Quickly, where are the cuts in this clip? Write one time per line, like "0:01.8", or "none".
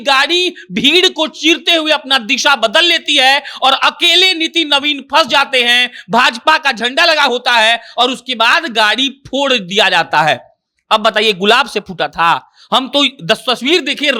none